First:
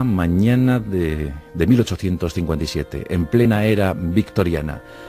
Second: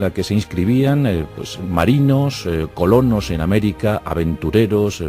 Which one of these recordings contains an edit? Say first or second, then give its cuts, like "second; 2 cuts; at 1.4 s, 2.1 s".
second; 1 cut; at 2.1 s